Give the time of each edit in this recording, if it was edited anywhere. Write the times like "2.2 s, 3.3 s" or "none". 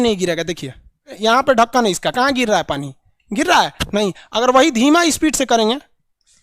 1.1 s